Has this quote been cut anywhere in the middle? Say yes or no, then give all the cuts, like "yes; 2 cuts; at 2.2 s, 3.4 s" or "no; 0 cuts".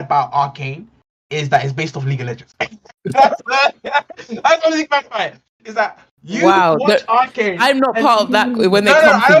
no; 0 cuts